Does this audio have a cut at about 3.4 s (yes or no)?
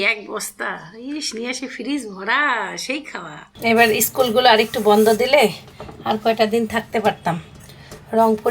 yes